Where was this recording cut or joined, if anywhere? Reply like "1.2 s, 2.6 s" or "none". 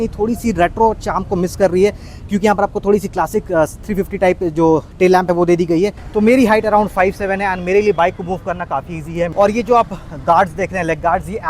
6.0 s, 9.3 s